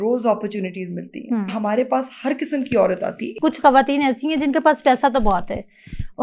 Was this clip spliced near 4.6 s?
no; 2 cuts; at 1.5 s, 3.3 s

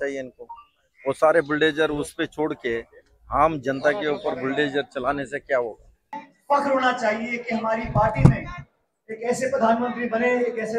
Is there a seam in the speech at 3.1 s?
no; 1 cut; at 6.3 s

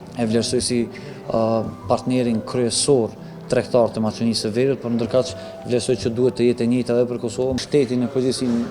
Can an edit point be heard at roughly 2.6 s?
no; 1 cut; at 7.6 s

